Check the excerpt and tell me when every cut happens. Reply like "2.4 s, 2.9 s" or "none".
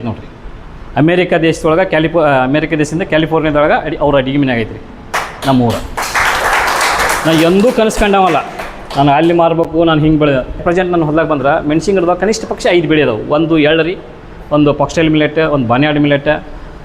10.6 s